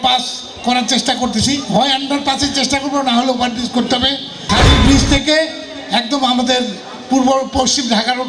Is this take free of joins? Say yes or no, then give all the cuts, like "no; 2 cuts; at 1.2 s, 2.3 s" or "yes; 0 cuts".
no; 1 cut; at 4.5 s